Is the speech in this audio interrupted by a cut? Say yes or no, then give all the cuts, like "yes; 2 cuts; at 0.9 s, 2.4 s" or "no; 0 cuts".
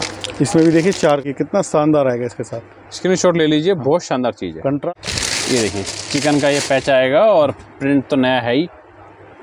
yes; 2 cuts; at 1.2 s, 4.9 s